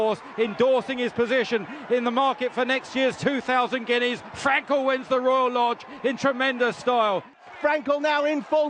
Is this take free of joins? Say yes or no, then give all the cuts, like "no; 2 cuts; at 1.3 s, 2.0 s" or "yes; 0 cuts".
no; 1 cut; at 7.4 s